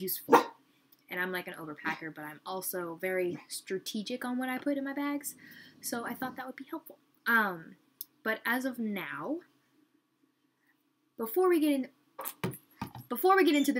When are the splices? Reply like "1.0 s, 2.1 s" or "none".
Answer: 12.2 s